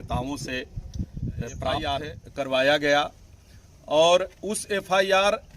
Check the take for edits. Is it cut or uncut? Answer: cut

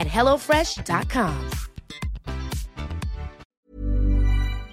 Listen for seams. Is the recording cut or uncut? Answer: cut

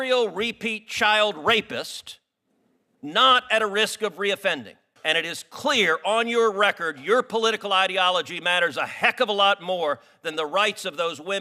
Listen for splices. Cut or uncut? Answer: cut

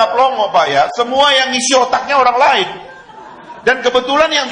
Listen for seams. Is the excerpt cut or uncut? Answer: uncut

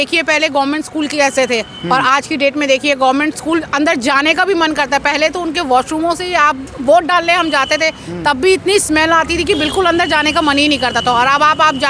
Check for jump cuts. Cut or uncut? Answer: uncut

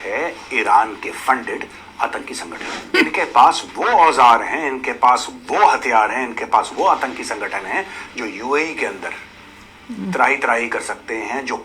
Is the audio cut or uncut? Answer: cut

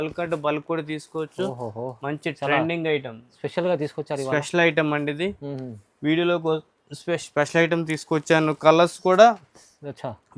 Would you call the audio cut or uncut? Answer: uncut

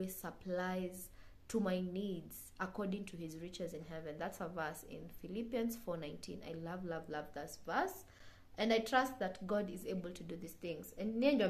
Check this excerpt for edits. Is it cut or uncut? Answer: uncut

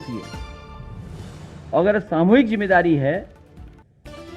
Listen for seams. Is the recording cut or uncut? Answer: uncut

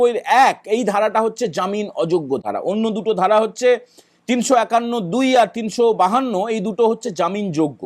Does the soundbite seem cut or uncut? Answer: uncut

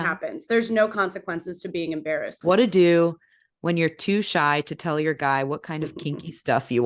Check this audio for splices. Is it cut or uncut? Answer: cut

